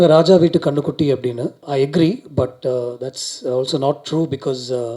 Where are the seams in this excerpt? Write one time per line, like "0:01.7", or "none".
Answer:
0:01.6